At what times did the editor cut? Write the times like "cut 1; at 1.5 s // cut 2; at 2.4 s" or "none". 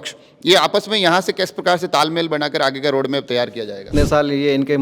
cut 1; at 3.8 s